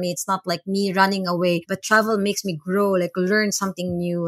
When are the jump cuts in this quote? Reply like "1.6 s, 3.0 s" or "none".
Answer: 1.7 s